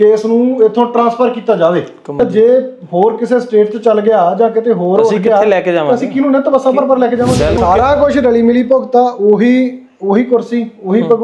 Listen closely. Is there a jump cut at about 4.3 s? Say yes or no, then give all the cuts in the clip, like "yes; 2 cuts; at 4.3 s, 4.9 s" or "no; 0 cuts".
no; 2 cuts; at 2.2 s, 7.6 s